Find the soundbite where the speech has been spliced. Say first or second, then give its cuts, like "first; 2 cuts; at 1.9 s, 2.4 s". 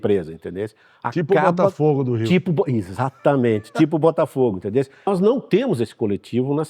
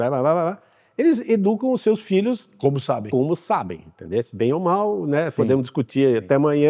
first; 1 cut; at 5.1 s